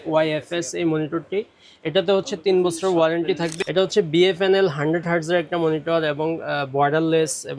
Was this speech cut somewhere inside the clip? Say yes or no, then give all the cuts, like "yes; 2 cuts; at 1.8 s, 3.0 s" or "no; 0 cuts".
yes; 1 cut; at 3.5 s